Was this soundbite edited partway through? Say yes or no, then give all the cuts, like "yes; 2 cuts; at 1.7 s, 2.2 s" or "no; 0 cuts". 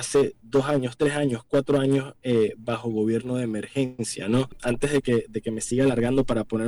yes; 1 cut; at 4.6 s